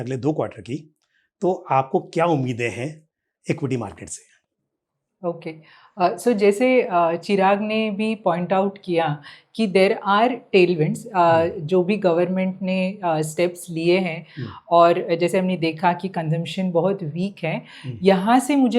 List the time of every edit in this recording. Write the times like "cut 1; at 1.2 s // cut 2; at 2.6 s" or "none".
none